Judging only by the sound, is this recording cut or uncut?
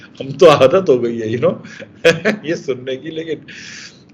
uncut